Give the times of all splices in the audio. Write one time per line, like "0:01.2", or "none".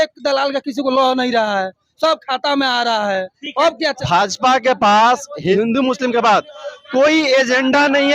0:03.8
0:05.5